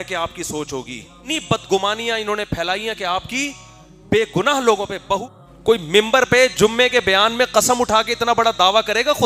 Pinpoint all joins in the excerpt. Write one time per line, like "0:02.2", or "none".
0:01.3
0:05.3